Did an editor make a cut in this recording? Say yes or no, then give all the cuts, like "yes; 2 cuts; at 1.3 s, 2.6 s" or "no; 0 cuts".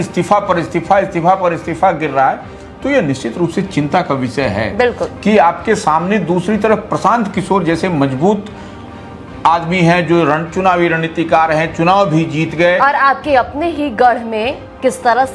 no; 0 cuts